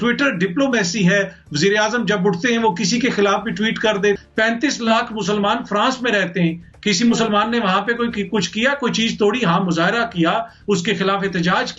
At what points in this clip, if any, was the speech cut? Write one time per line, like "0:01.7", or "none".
0:04.2